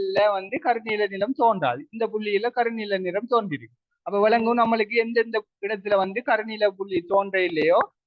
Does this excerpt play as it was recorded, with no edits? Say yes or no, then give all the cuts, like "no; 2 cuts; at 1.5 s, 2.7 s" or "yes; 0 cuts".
yes; 0 cuts